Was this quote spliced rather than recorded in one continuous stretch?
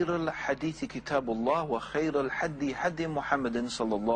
no; 0 cuts

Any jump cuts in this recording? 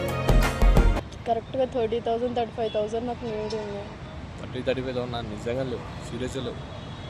yes; 1 cut; at 1.0 s

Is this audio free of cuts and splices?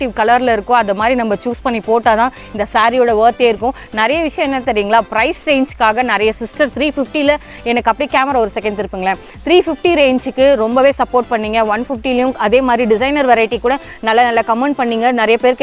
yes; 0 cuts

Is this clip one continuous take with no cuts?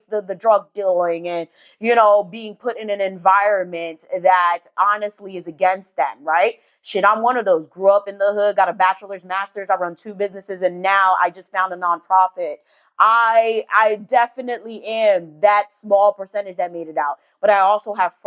yes; 0 cuts

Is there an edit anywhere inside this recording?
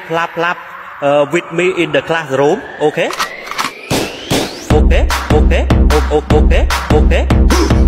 no; 0 cuts

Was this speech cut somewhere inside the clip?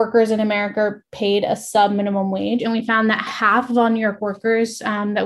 yes; 1 cut; at 2.6 s

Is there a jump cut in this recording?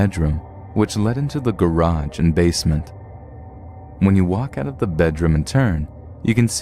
yes; 1 cut; at 0.9 s

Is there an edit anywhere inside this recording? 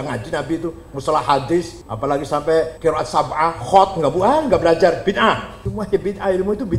yes; 3 cuts; at 1.8 s, 2.7 s, 5.6 s

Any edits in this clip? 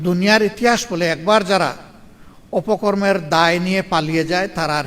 no; 0 cuts

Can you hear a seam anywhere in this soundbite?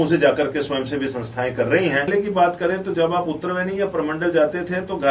yes; 1 cut; at 2.1 s

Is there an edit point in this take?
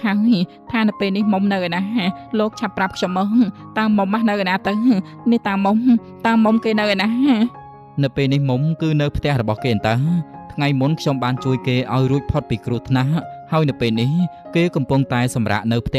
no; 0 cuts

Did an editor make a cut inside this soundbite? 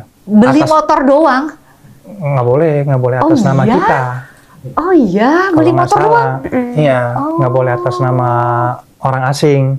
no; 0 cuts

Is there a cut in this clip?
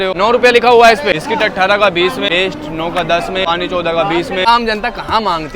yes; 4 cuts; at 1.1 s, 2.3 s, 3.4 s, 4.5 s

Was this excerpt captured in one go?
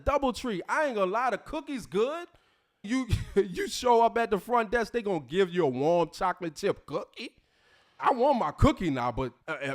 no; 2 cuts; at 2.9 s, 8.0 s

